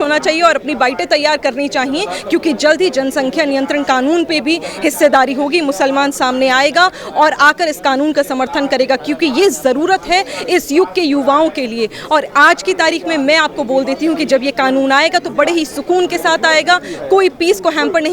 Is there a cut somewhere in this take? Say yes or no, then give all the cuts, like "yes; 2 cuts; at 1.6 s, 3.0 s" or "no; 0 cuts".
no; 0 cuts